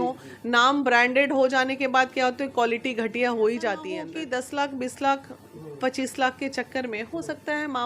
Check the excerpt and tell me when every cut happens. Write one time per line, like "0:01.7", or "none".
0:04.0